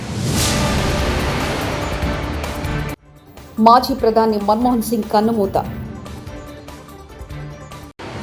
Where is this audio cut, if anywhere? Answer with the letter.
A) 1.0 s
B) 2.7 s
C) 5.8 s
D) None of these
B